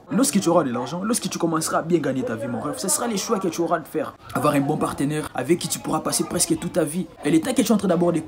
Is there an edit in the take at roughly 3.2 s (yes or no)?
no